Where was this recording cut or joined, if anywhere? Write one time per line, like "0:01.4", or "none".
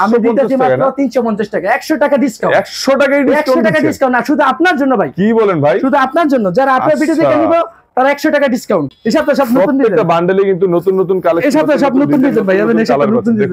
0:08.9